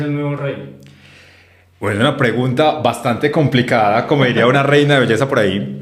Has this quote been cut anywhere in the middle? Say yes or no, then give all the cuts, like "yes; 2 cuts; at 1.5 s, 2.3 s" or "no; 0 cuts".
no; 0 cuts